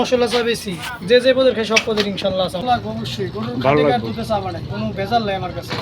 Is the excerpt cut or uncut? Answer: cut